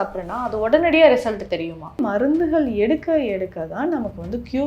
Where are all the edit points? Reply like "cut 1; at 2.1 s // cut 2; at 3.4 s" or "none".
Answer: cut 1; at 2.0 s